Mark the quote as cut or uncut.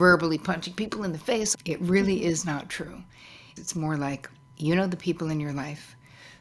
cut